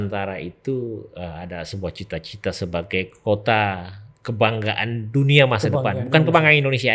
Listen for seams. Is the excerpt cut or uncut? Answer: uncut